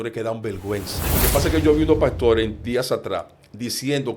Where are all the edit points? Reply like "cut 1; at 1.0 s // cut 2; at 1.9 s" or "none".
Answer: cut 1; at 1.0 s